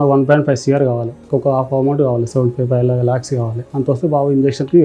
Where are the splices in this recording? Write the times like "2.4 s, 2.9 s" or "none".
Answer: 1.1 s, 3.6 s